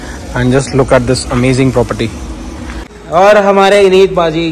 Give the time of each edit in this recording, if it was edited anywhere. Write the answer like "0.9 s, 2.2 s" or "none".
2.9 s